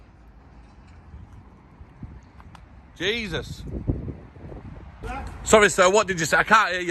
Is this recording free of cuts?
no; 1 cut; at 5.0 s

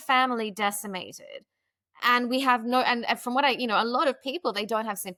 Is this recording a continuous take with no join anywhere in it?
yes; 0 cuts

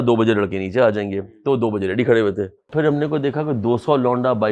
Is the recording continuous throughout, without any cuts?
no; 1 cut; at 2.7 s

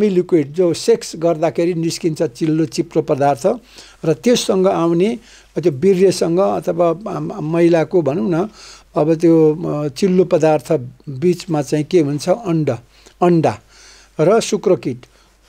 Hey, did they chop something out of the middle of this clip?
no; 0 cuts

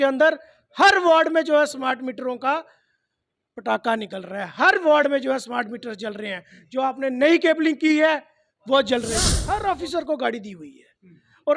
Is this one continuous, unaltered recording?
no; 1 cut; at 9.4 s

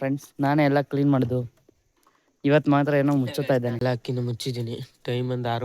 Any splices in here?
yes; 1 cut; at 3.8 s

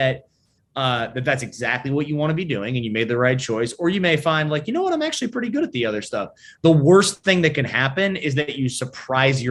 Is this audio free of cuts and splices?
yes; 0 cuts

